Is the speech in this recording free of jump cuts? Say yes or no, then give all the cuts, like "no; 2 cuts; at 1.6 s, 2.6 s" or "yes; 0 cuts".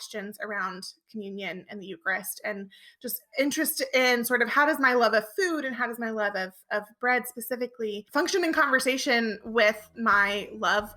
yes; 0 cuts